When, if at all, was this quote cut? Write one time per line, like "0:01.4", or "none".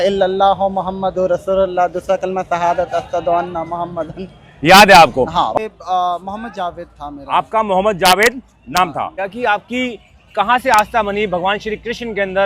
0:05.5
0:09.2

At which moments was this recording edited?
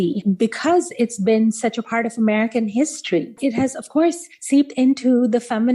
0:03.4

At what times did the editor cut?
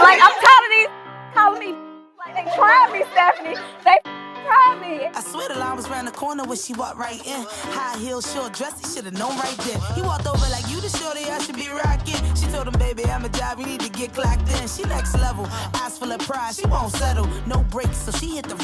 0:04.9

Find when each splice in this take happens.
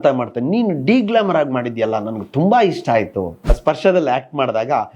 0:03.4

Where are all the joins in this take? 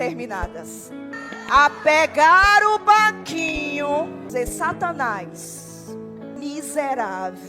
0:01.1
0:04.3
0:06.4

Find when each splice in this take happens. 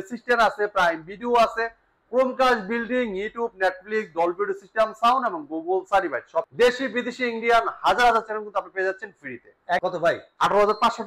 0:06.5
0:09.8

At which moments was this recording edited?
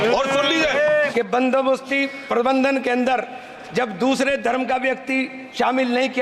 0:01.1

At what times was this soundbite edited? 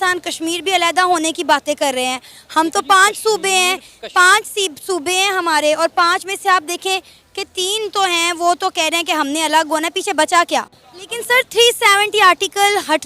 0:10.8

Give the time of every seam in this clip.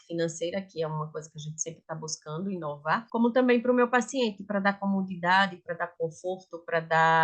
0:03.0

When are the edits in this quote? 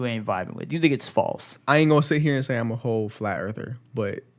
0:01.5

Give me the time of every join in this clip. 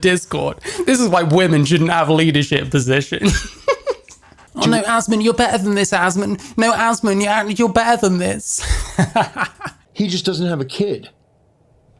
0:04.4
0:09.7

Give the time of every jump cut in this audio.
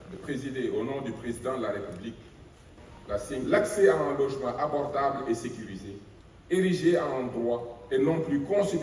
0:03.4

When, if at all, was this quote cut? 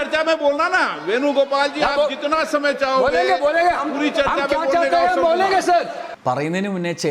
none

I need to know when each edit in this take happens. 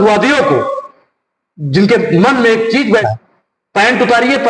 0:03.0

